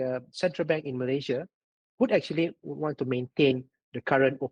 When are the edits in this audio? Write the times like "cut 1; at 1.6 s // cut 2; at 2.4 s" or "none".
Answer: none